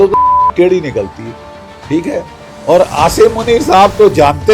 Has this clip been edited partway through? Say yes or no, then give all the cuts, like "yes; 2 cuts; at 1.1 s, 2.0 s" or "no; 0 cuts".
no; 0 cuts